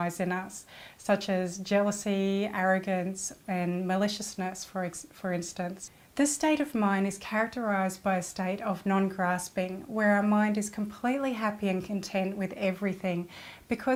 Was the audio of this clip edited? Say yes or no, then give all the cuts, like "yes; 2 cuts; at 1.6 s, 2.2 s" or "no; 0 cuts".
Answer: no; 0 cuts